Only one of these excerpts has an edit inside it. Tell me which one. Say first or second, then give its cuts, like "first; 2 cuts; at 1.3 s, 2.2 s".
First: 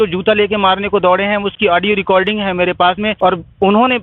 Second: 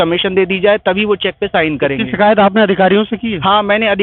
first; 1 cut; at 3.1 s